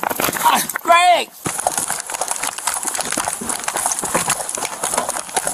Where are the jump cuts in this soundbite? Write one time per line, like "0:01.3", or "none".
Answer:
0:01.4
0:02.6